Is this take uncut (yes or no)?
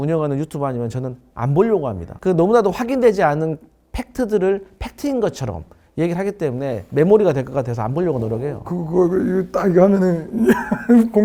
yes